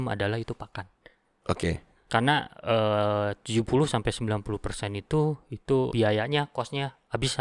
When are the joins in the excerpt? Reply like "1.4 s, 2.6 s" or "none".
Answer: 5.9 s